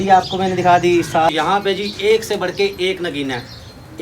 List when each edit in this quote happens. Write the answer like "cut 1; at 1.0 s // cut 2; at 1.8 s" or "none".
cut 1; at 1.3 s